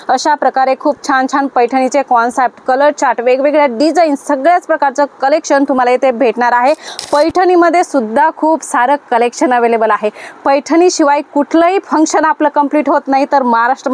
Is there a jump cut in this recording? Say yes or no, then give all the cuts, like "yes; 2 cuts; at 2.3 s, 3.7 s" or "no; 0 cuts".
yes; 1 cut; at 6.9 s